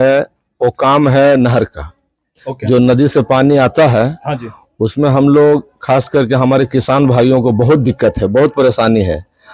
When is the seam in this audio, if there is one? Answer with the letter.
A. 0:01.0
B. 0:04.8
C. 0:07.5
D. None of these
D